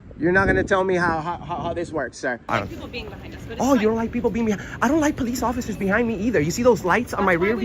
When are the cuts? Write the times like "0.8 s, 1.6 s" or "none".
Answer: 2.4 s